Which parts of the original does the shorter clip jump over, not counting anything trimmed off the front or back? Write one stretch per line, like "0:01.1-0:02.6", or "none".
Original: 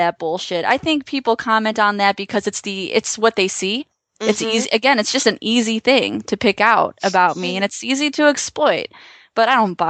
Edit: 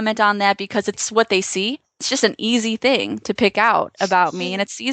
0:02.6-0:03.1
0:04.1-0:05.1

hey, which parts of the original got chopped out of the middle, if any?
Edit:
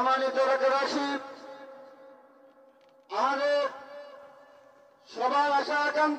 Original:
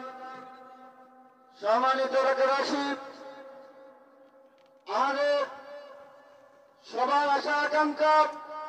none

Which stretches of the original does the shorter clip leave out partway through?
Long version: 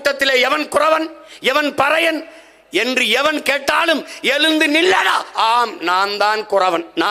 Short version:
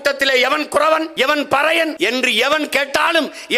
0:01.1-0:01.4
0:02.2-0:02.7

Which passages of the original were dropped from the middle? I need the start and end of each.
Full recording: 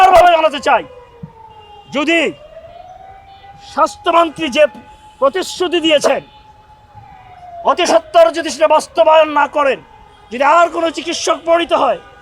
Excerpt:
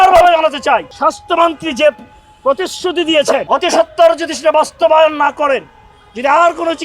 0:00.9-0:03.7
0:06.2-0:07.6

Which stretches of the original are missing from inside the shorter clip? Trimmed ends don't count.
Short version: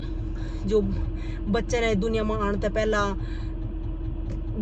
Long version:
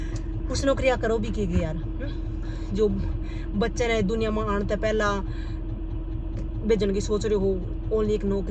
none

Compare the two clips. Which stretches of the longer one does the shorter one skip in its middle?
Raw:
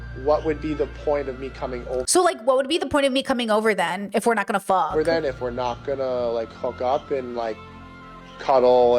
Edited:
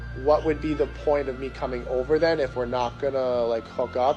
0:02.1-0:04.9

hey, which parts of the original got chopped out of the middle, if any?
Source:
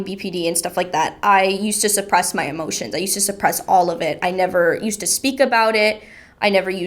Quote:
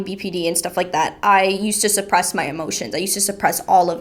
none

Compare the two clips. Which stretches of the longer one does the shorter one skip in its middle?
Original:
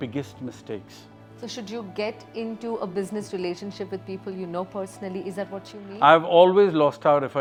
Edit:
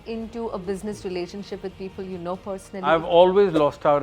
0:05.2-0:06.1

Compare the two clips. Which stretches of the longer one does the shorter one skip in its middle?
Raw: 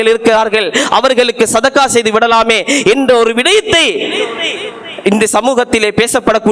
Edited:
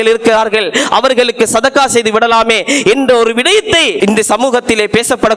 0:04.0-0:05.0

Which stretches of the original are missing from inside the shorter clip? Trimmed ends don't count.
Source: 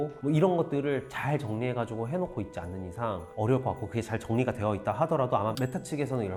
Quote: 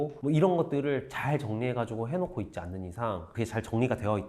0:03.3-0:03.8

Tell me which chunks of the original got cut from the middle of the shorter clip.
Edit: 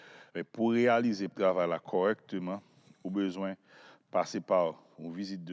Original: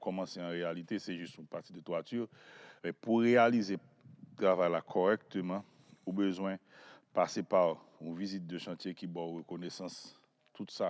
0:03.8-0:04.3

